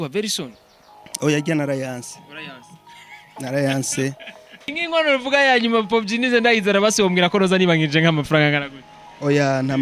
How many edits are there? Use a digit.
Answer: 1